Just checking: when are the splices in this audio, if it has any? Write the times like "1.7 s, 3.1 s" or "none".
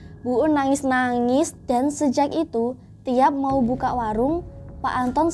1.5 s